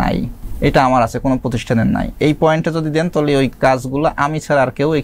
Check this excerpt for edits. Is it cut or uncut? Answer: cut